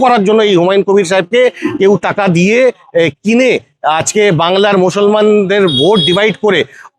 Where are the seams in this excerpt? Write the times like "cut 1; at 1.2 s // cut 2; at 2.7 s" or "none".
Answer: none